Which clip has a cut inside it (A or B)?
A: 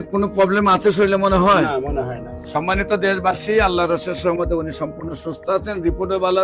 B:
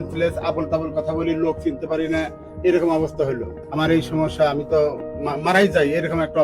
B